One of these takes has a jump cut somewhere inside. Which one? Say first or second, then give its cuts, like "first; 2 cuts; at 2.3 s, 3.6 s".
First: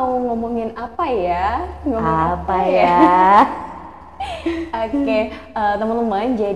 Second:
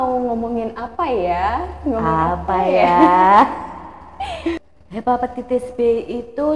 second; 1 cut; at 4.6 s